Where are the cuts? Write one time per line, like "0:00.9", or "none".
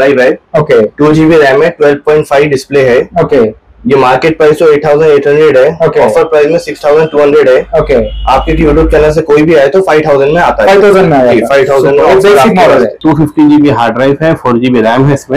0:13.0